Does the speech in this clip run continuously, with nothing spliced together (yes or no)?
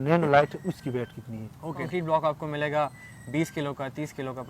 no